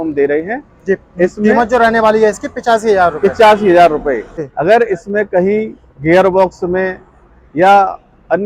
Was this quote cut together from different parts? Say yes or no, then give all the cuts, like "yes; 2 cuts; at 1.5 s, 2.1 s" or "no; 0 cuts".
yes; 1 cut; at 4.4 s